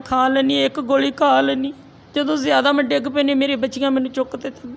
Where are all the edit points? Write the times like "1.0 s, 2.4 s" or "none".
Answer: none

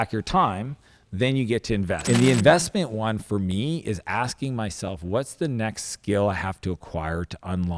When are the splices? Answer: 2.0 s

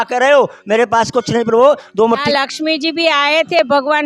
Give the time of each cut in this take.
2.2 s

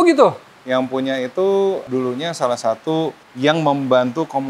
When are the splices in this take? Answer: 1.9 s, 3.2 s

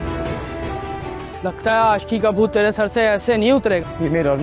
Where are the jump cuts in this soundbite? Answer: 1.2 s

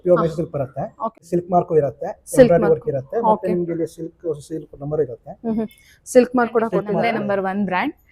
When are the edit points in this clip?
1.2 s, 7.0 s

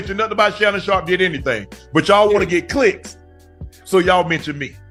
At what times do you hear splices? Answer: none

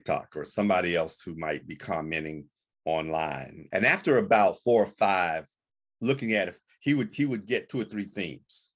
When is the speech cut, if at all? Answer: none

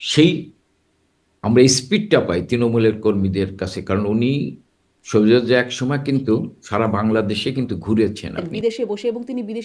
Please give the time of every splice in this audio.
8.5 s

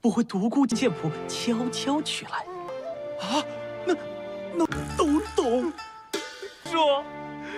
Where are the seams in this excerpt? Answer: none

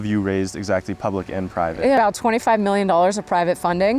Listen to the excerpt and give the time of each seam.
2.0 s

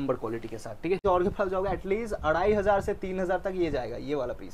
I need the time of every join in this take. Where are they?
1.0 s

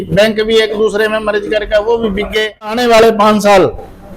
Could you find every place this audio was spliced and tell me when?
2.9 s

